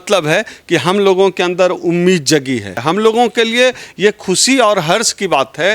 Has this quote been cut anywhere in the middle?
yes; 1 cut; at 2.7 s

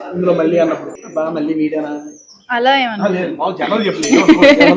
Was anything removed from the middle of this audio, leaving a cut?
yes; 1 cut; at 1.0 s

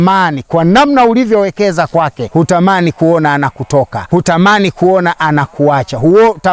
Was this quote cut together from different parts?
yes; 2 cuts; at 2.2 s, 4.0 s

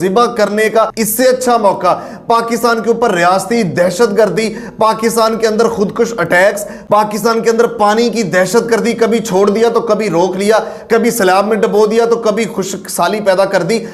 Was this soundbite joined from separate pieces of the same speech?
no; 0 cuts

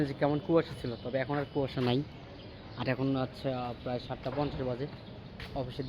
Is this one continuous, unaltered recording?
yes; 0 cuts

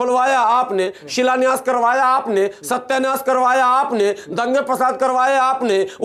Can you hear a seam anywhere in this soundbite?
no; 0 cuts

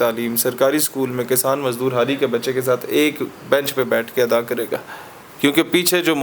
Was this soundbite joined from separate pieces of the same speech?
yes; 1 cut; at 4.7 s

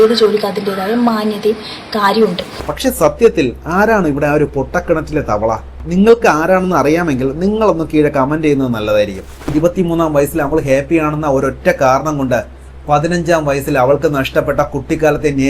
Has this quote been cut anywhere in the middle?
yes; 2 cuts; at 2.7 s, 9.5 s

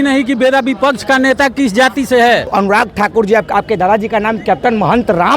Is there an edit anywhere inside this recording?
yes; 1 cut; at 2.5 s

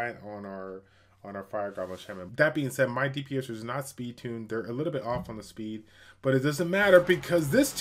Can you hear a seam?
yes; 1 cut; at 2.3 s

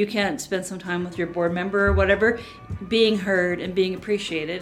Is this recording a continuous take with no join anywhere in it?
no; 2 cuts; at 1.1 s, 2.5 s

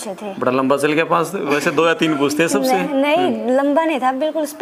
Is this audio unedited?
yes; 0 cuts

